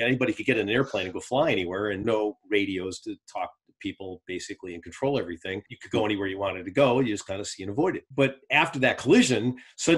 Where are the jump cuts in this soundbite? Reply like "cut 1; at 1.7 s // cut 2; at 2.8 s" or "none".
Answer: cut 1; at 2.0 s // cut 2; at 5.6 s // cut 3; at 8.0 s